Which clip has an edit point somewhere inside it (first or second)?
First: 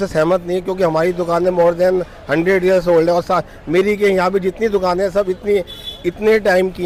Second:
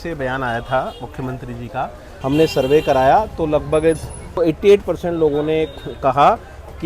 second